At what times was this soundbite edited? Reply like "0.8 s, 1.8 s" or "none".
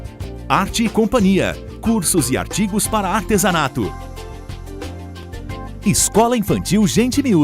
5.8 s

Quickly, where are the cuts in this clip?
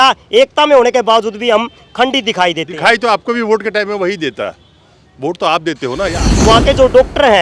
6.3 s

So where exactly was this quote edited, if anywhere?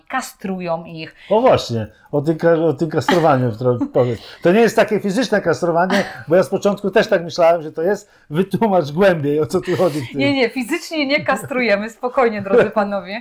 none

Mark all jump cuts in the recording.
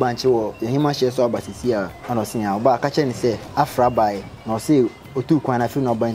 2.0 s, 3.4 s, 4.3 s

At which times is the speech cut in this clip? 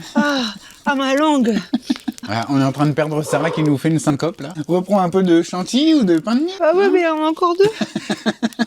2.2 s, 4.5 s, 6.5 s

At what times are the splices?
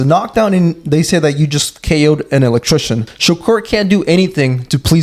3.1 s

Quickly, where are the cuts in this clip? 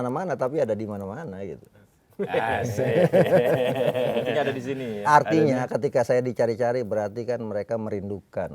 none

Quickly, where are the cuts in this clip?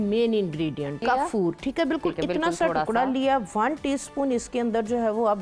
1.0 s

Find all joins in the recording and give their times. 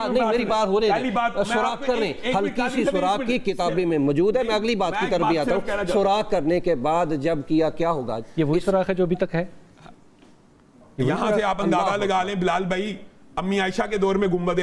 none

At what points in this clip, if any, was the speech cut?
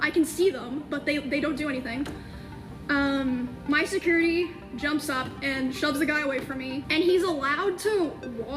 6.8 s

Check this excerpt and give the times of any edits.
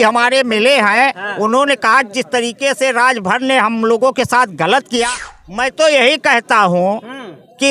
5.2 s

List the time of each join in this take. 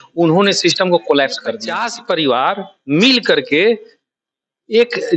1.9 s

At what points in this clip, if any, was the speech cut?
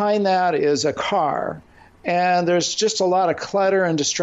none

